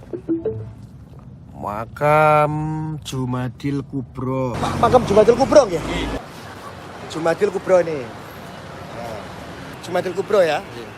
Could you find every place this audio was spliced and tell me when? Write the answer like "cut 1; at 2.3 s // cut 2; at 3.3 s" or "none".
cut 1; at 4.6 s // cut 2; at 6.2 s // cut 3; at 9.8 s